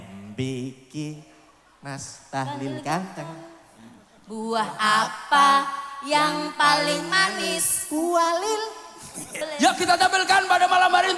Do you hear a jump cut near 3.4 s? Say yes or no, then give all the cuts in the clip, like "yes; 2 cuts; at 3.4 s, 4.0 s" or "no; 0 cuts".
no; 1 cut; at 9.4 s